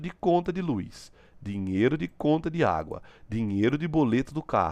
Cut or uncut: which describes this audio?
uncut